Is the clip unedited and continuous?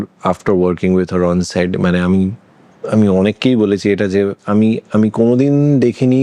yes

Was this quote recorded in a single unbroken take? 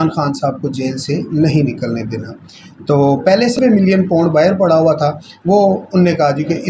no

